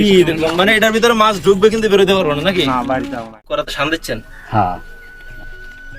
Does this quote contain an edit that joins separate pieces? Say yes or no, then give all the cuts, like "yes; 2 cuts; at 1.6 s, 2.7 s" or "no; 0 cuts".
yes; 1 cut; at 3.3 s